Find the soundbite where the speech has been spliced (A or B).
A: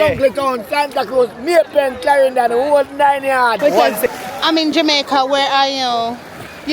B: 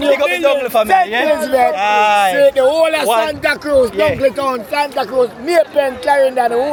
A